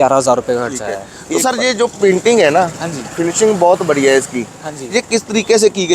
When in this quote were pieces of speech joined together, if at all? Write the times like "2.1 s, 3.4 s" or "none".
1.1 s